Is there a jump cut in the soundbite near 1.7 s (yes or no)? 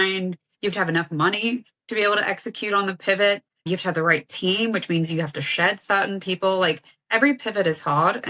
no